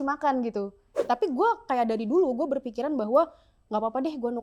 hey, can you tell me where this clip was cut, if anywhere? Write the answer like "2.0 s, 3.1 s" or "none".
0.9 s